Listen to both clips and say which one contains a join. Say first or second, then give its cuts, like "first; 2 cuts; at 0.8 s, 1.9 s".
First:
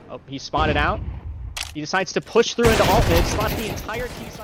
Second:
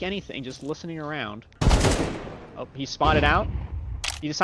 second; 1 cut; at 1.5 s